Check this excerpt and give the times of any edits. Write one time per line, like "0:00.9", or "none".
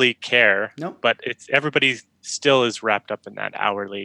none